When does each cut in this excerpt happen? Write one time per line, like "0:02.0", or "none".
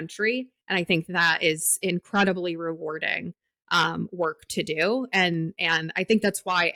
none